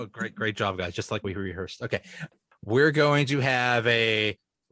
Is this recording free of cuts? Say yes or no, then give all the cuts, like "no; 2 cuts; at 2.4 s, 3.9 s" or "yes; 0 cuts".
no; 1 cut; at 2.2 s